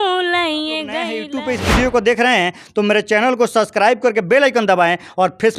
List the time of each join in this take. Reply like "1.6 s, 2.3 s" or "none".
1.3 s